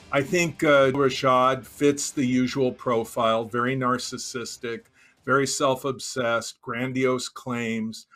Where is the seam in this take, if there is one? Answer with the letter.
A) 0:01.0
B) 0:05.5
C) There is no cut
A